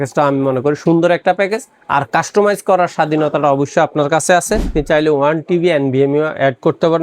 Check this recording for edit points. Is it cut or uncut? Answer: cut